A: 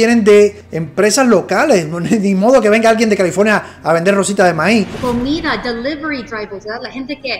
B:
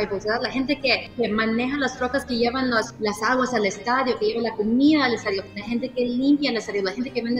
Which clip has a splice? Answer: A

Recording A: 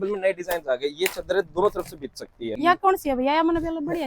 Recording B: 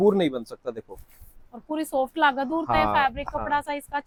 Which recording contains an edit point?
A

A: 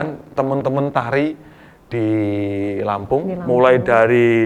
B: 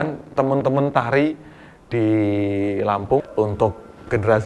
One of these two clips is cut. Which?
B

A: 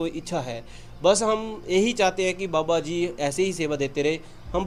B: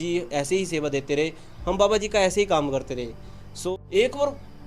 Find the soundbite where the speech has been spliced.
B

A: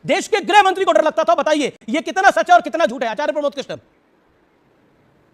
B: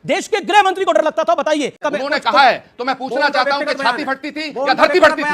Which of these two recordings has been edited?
B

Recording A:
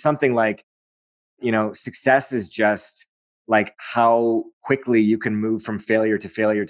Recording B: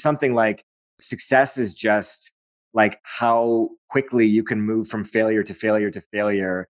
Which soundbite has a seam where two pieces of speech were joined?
B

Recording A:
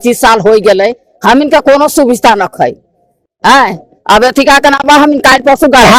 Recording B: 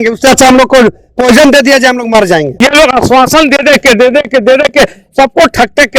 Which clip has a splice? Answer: B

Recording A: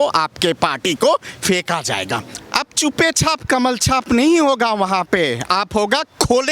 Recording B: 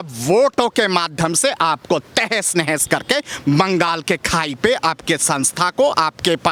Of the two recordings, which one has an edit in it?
A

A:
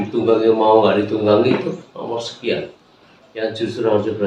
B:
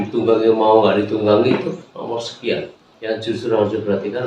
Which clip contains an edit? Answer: B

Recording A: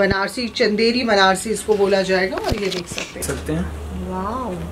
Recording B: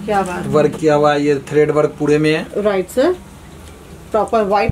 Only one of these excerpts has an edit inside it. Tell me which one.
A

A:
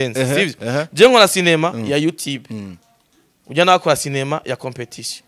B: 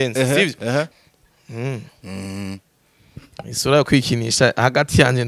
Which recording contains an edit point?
B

